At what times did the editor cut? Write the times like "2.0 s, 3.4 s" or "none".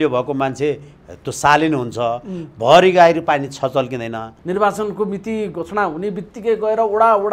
4.3 s